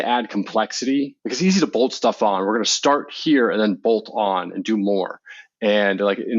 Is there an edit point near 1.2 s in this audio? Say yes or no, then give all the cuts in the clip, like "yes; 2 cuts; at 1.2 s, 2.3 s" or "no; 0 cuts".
yes; 1 cut; at 1.2 s